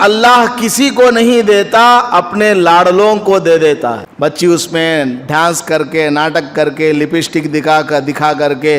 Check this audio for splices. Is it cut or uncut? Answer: cut